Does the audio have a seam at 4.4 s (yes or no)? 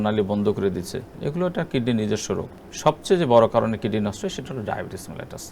no